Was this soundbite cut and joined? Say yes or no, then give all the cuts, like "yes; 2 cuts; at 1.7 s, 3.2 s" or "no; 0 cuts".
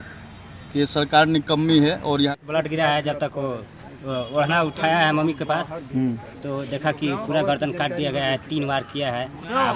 yes; 1 cut; at 2.3 s